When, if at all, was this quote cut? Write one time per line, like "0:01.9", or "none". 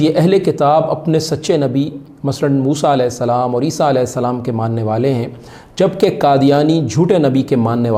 none